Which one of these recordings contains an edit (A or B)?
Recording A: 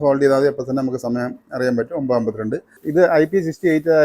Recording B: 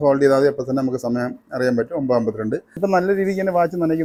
A